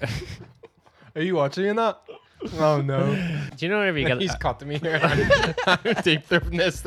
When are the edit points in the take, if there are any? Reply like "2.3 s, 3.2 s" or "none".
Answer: 3.4 s